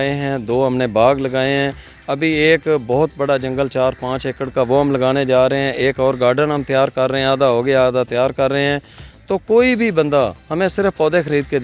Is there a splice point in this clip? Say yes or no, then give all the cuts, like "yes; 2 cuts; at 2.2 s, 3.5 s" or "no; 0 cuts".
no; 0 cuts